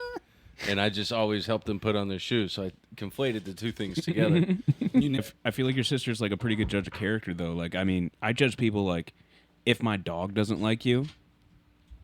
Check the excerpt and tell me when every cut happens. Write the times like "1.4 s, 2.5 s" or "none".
5.2 s